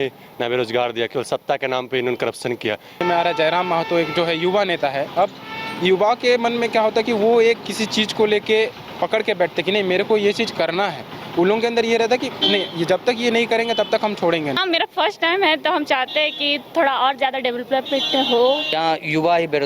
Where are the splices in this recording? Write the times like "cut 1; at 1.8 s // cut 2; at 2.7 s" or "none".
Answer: cut 1; at 3.0 s // cut 2; at 14.6 s // cut 3; at 18.7 s